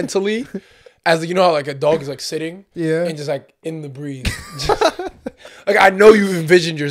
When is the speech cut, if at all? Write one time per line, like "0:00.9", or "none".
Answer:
none